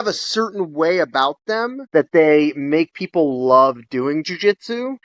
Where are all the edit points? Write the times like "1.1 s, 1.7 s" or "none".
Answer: none